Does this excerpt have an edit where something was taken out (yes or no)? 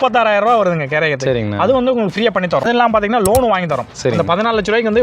yes